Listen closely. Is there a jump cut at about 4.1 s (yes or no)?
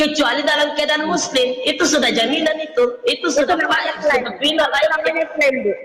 no